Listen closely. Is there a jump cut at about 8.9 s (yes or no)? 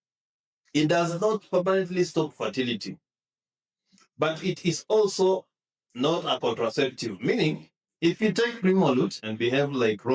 no